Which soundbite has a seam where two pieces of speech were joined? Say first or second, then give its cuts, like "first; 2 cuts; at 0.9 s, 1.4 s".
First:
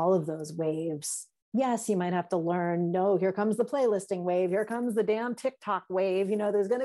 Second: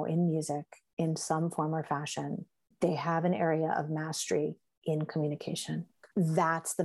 second; 2 cuts; at 2.7 s, 6.0 s